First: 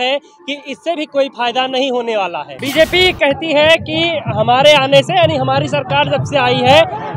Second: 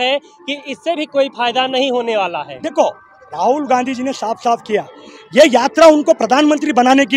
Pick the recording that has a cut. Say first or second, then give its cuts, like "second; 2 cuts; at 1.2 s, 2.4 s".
first; 1 cut; at 2.5 s